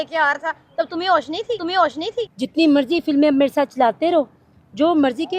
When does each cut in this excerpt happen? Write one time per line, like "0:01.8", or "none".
0:02.4